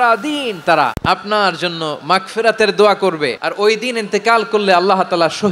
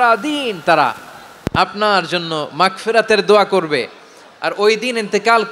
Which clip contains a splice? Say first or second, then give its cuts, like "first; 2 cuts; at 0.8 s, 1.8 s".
first; 2 cuts; at 1.0 s, 3.4 s